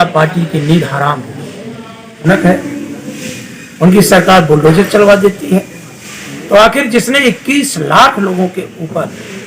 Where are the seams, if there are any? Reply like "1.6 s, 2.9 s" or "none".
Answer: 2.2 s